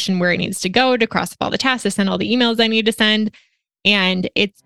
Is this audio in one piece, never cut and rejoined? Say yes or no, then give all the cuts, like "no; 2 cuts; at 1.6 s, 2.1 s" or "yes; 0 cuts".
yes; 0 cuts